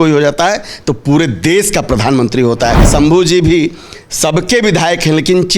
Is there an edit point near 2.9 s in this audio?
yes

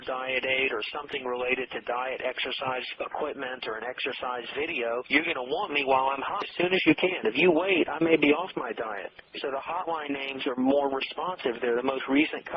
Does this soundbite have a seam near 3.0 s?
no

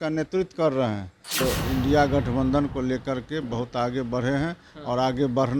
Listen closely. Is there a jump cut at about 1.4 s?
yes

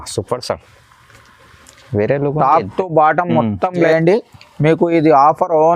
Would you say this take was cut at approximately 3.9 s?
yes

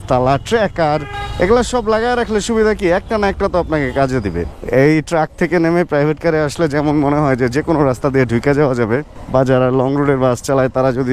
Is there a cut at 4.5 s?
yes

